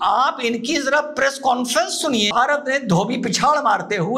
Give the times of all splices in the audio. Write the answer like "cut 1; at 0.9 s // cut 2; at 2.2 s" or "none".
cut 1; at 2.3 s